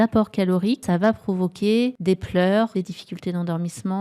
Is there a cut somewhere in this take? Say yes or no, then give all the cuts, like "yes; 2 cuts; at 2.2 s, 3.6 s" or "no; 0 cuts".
yes; 3 cuts; at 0.8 s, 2.0 s, 2.7 s